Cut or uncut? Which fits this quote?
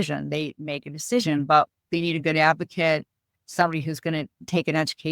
uncut